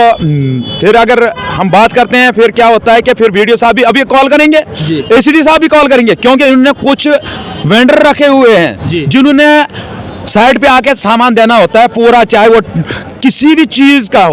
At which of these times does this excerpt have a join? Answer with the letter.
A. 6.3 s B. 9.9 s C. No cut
C